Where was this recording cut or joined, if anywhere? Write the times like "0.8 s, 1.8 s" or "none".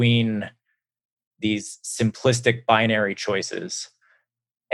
none